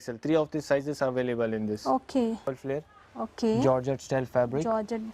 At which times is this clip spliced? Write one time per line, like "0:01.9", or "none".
0:02.6